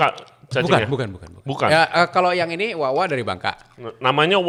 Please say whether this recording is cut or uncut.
uncut